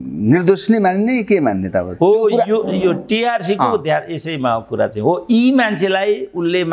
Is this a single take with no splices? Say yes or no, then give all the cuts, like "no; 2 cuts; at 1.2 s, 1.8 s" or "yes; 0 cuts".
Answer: yes; 0 cuts